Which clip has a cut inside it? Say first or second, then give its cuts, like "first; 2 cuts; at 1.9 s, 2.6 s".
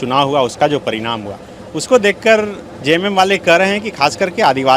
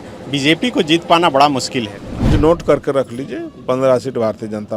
second; 1 cut; at 2.3 s